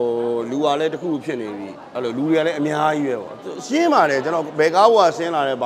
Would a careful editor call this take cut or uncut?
uncut